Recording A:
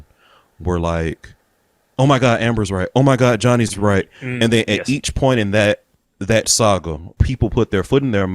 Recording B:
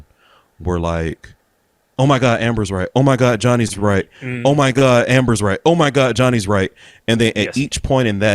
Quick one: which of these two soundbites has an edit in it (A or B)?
A